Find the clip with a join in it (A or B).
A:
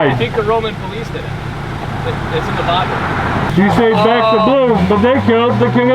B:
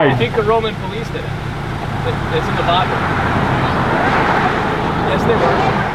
A